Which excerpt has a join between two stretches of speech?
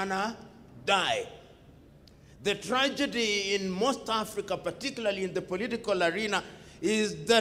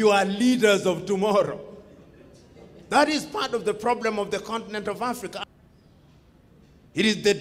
second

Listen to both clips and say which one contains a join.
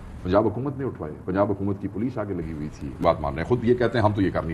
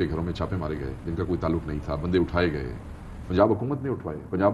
first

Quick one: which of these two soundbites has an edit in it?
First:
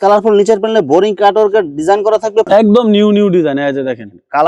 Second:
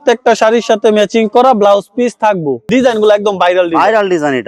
first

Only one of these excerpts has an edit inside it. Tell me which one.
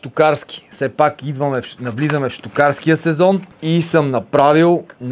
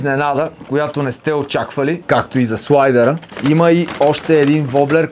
second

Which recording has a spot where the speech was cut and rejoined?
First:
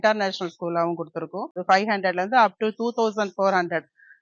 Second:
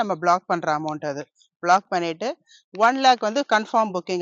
first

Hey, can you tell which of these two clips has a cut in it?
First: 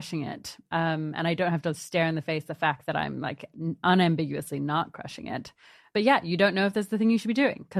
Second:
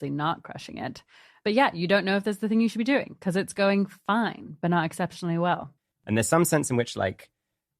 second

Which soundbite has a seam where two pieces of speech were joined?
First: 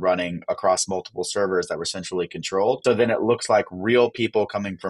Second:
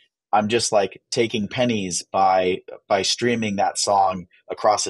first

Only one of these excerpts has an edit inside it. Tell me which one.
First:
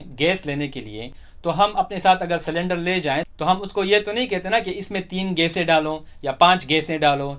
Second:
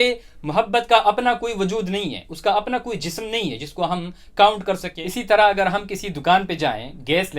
second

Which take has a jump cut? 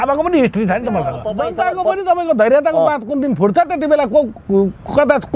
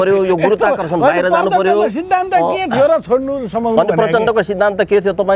first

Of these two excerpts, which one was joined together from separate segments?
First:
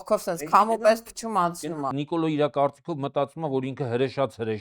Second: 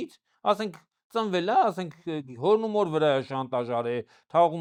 first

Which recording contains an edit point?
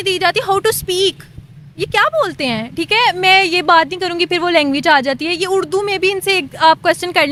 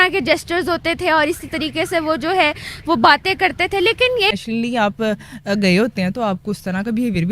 second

